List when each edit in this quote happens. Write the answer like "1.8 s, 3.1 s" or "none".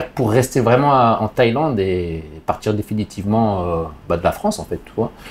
none

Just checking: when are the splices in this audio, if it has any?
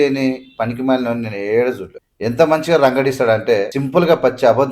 1.9 s, 3.8 s

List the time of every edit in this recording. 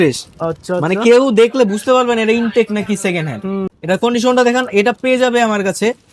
none

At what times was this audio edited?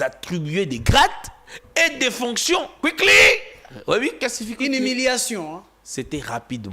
2.7 s

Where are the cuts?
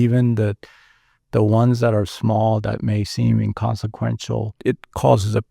4.5 s

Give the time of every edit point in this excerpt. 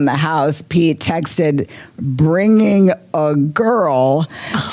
none

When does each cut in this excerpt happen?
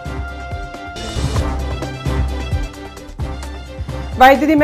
3.6 s

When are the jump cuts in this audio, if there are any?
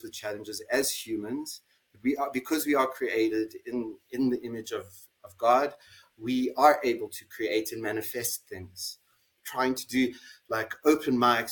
9.4 s

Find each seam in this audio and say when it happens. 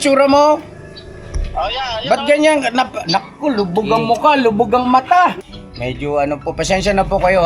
5.5 s

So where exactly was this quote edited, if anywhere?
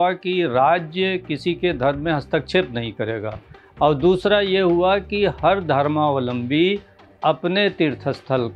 none

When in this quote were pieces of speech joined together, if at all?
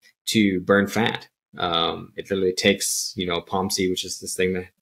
none

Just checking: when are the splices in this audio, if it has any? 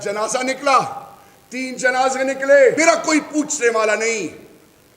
2.8 s

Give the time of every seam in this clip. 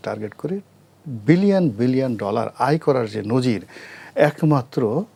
none

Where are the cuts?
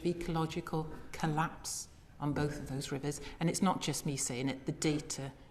none

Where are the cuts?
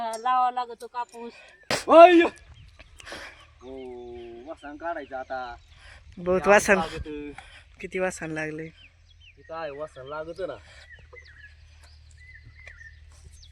1.5 s

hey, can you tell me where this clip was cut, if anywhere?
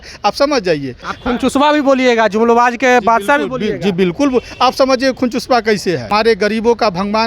1.1 s, 6.0 s

